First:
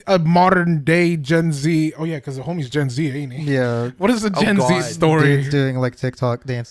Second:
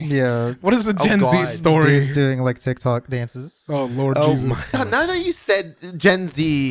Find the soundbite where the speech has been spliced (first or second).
second